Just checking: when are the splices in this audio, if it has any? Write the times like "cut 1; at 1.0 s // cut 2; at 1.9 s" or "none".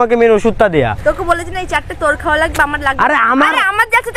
cut 1; at 1.0 s